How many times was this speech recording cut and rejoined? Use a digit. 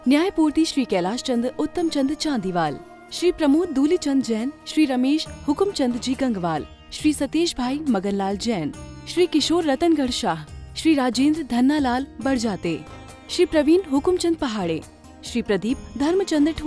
0